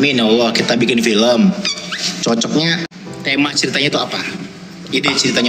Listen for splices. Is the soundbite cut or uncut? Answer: cut